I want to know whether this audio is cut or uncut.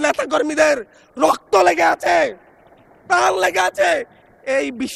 uncut